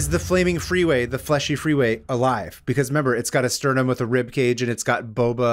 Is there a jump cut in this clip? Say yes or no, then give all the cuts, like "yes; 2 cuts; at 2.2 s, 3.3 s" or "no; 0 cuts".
no; 0 cuts